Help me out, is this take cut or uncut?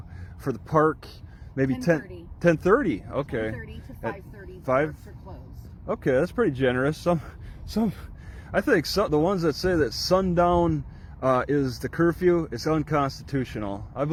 uncut